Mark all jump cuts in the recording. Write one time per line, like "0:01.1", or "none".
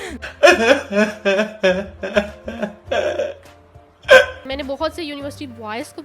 0:04.5